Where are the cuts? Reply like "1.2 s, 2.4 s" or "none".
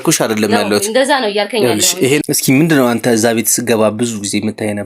2.2 s